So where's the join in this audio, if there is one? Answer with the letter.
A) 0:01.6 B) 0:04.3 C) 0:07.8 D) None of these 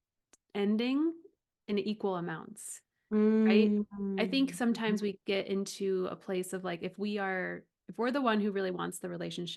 D